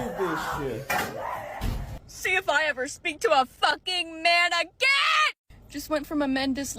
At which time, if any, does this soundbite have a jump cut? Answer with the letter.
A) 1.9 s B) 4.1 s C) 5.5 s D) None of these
A